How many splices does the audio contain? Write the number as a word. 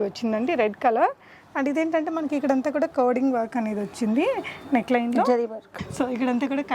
zero